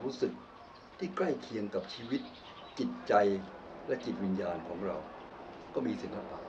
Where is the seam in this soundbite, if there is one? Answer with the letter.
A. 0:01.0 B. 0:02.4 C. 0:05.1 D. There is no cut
D